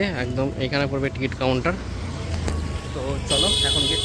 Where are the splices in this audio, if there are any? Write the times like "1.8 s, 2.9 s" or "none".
none